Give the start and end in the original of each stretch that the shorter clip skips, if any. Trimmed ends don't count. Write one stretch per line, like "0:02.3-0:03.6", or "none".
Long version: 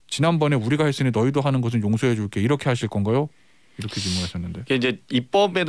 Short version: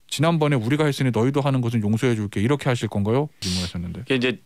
0:03.4-0:04.0

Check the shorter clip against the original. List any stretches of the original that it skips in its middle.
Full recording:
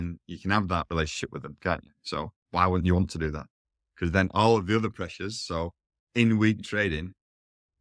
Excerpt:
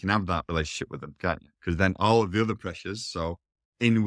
0:01.9-0:03.8

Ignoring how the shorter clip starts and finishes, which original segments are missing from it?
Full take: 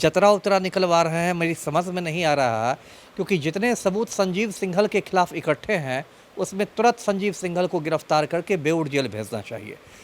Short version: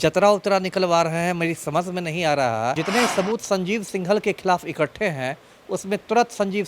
0:02.8-0:03.5

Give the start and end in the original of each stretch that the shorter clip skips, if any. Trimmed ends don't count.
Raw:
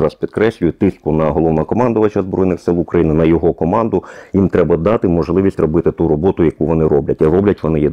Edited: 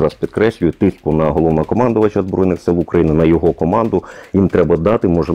none

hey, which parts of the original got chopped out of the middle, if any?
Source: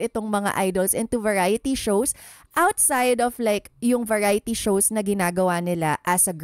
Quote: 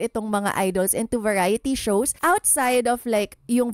0:02.1-0:02.5

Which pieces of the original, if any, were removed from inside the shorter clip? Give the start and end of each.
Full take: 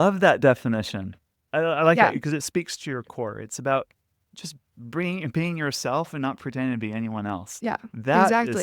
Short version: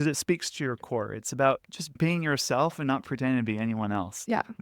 0:04.2-0:05.3

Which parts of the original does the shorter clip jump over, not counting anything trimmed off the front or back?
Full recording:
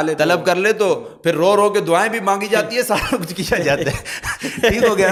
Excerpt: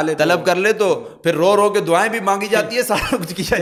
none

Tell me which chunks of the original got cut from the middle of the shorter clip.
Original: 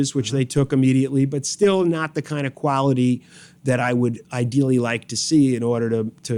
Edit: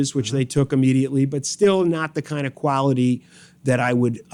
none

